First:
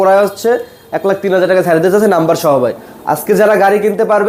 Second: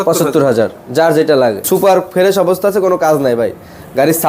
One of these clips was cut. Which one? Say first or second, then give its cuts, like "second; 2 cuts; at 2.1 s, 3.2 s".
second; 1 cut; at 1.6 s